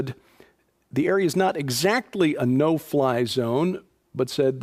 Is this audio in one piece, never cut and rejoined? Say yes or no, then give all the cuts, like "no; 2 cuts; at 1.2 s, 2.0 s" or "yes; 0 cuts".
yes; 0 cuts